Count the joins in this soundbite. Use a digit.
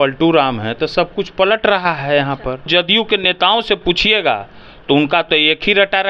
1